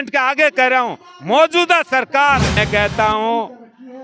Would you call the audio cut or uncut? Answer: cut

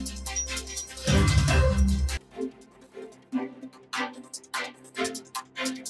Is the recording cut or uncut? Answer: uncut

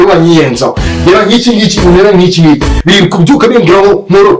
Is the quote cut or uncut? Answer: uncut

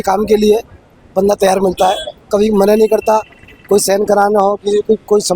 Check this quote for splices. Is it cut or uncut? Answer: uncut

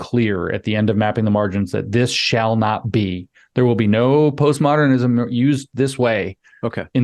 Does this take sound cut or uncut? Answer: uncut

